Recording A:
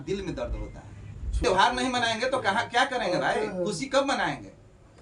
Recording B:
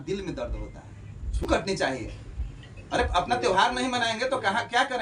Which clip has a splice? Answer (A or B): A